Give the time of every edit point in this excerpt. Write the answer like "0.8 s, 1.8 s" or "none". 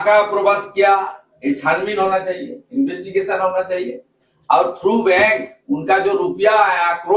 none